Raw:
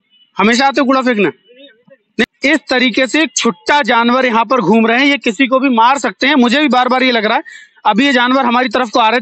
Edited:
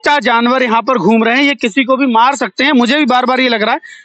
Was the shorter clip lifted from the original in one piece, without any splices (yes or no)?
yes